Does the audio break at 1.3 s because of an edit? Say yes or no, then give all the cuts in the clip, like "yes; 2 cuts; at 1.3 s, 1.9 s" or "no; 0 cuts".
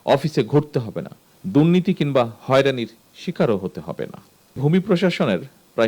yes; 2 cuts; at 1.3 s, 4.6 s